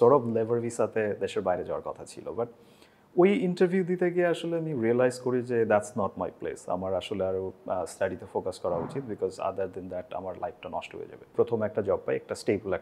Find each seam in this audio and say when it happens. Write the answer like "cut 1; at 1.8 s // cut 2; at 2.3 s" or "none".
cut 1; at 11.2 s